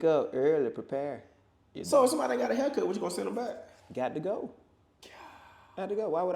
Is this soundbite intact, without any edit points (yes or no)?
yes